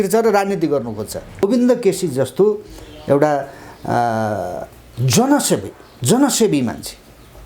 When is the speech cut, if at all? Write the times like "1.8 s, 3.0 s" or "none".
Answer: 1.4 s

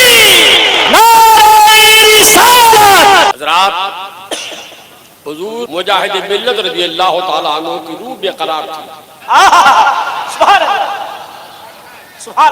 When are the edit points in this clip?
3.3 s, 5.7 s

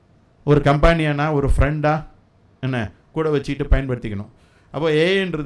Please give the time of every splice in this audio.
none

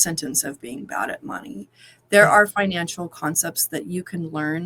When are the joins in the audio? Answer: none

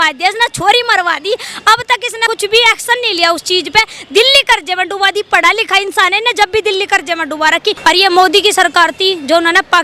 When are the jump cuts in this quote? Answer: 2.2 s, 7.8 s

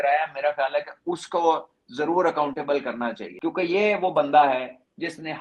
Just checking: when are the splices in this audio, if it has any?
3.3 s

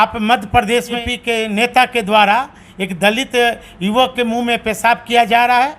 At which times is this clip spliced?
1.0 s

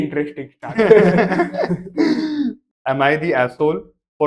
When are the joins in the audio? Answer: 2.7 s

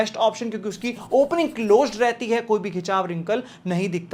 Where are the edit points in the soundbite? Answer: none

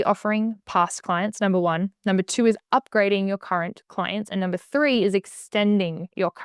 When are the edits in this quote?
none

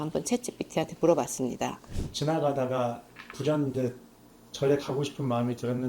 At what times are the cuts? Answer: 1.9 s

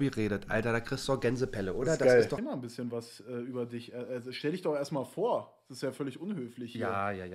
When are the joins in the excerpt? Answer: 2.4 s

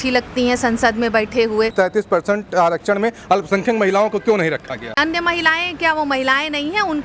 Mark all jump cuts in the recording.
1.7 s, 5.0 s

